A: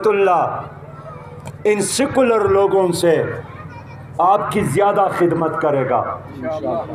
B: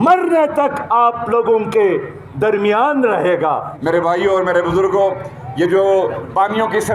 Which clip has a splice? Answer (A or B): B